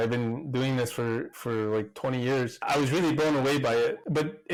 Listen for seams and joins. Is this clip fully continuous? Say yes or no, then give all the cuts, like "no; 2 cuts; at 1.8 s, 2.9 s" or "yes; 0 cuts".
yes; 0 cuts